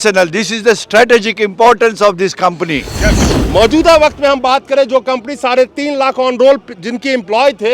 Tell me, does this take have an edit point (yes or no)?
yes